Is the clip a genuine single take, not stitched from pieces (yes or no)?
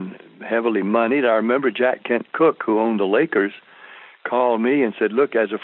yes